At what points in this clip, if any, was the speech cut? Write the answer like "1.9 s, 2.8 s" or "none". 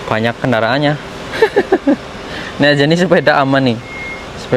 none